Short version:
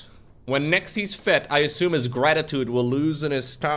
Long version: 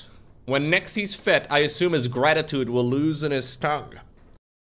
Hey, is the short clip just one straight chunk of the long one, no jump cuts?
yes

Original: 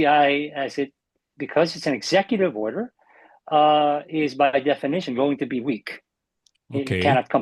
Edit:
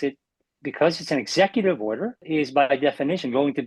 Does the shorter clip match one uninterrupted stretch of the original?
no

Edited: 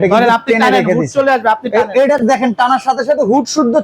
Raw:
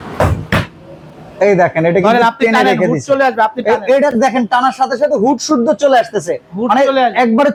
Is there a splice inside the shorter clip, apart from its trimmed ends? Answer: no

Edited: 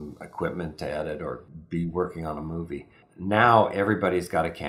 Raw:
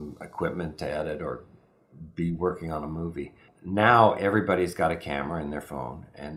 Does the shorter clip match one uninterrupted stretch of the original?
no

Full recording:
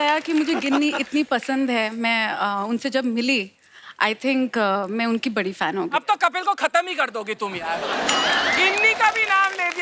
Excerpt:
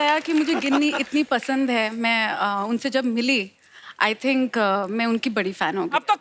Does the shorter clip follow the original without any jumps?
yes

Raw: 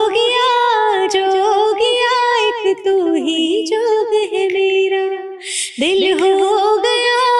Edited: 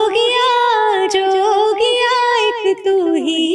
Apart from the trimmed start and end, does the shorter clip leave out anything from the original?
no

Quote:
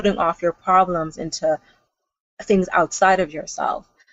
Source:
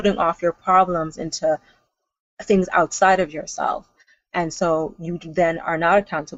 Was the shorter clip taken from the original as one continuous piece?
yes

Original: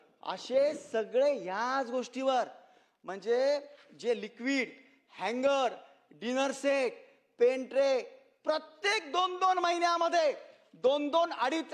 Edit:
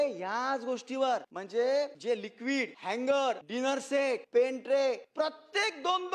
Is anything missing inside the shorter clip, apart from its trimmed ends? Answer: yes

